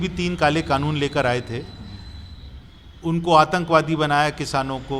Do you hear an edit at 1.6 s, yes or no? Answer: no